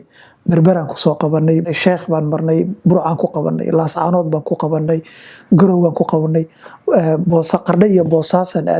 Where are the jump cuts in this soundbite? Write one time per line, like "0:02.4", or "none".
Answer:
0:01.7